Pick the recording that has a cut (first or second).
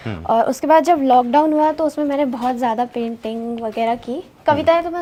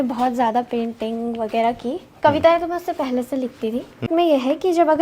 second